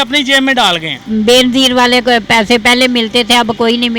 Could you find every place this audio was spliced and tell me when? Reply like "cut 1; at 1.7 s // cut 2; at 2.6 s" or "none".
cut 1; at 1.0 s